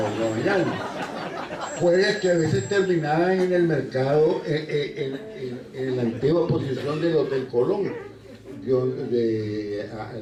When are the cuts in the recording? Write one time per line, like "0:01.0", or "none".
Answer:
none